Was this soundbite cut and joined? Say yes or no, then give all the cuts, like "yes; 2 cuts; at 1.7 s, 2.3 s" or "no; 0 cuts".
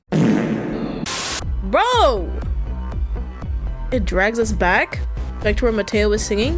yes; 1 cut; at 1.0 s